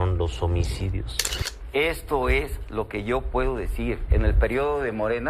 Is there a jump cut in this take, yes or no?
yes